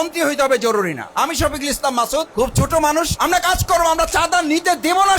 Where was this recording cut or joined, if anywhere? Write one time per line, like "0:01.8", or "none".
0:02.3
0:03.1